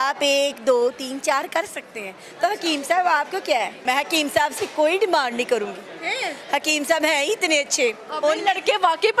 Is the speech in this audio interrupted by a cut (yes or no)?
yes